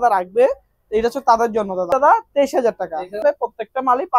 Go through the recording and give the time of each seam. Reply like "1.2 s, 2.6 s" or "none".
1.9 s, 3.2 s